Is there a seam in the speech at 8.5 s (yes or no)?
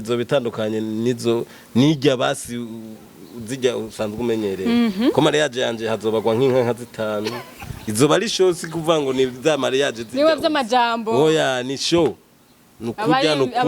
no